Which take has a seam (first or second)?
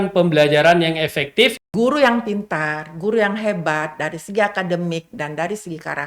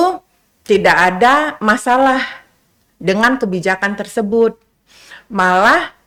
first